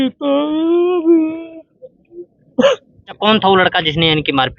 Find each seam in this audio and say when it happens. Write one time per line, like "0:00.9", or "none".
0:03.2